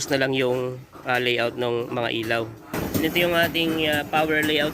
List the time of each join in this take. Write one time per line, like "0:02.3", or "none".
0:02.7